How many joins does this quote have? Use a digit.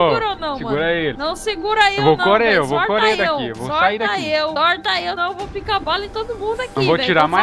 2